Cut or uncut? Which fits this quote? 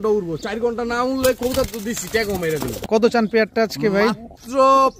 cut